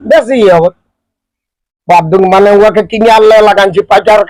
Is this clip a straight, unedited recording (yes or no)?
yes